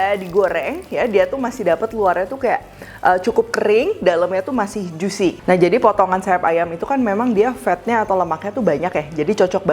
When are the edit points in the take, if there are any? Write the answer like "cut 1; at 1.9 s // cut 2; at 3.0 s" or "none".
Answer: none